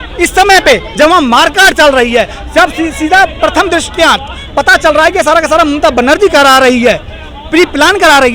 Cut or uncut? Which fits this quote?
uncut